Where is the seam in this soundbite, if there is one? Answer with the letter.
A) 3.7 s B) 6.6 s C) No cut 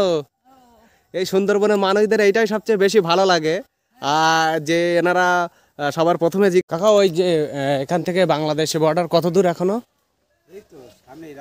B